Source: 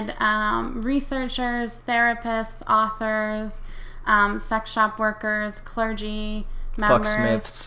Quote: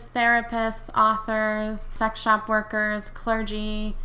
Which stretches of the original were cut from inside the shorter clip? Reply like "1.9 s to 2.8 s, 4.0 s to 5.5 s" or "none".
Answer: 3.7 s to 4.4 s